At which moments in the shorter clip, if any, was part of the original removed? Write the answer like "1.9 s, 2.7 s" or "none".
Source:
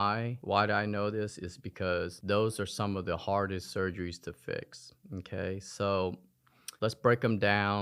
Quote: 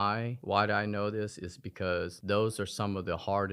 none